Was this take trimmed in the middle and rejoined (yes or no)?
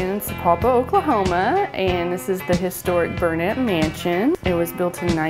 yes